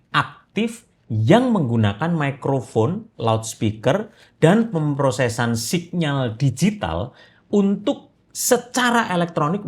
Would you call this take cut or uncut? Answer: uncut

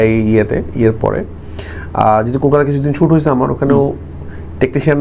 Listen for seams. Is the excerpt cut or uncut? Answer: uncut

